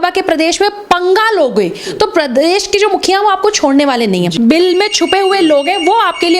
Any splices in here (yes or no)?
yes